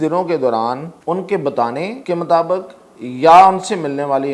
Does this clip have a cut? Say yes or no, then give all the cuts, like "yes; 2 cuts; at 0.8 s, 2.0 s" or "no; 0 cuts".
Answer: yes; 2 cuts; at 0.9 s, 2.0 s